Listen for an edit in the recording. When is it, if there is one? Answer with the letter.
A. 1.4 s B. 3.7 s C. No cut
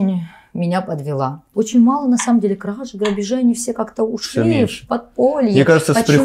A